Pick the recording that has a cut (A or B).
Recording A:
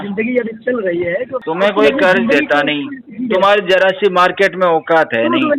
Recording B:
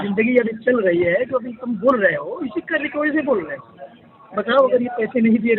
A